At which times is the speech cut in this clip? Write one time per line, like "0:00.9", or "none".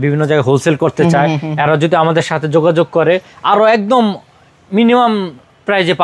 none